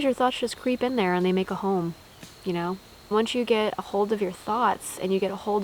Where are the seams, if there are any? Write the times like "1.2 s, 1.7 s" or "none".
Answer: 3.1 s